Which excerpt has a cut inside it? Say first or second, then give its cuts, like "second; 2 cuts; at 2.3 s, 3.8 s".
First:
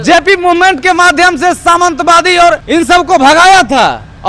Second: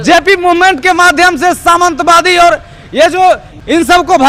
first; 1 cut; at 2.6 s